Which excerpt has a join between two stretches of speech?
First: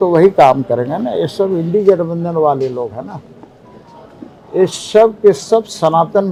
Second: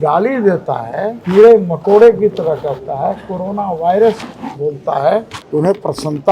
second; 2 cuts; at 1.2 s, 5.4 s

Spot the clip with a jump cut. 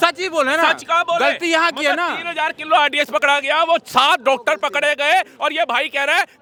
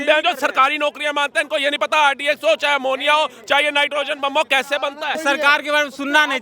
second; 1 cut; at 5.2 s

